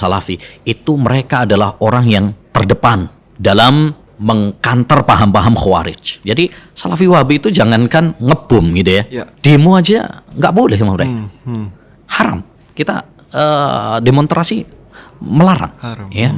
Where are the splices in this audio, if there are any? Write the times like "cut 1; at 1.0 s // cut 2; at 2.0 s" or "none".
cut 1; at 2.4 s // cut 2; at 3.2 s // cut 3; at 4.1 s // cut 4; at 6.1 s // cut 5; at 9.2 s